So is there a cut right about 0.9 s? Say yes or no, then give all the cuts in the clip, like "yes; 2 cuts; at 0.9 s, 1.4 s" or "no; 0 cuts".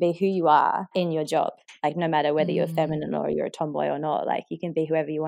yes; 1 cut; at 0.9 s